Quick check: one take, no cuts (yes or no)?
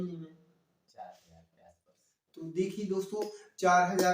yes